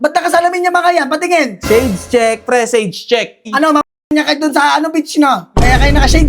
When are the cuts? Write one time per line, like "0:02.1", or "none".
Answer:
0:03.4